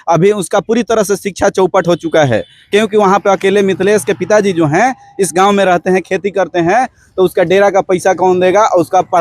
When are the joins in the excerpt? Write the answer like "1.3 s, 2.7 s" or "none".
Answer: none